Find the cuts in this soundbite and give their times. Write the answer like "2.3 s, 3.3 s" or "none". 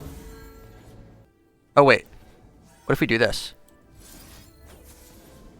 1.3 s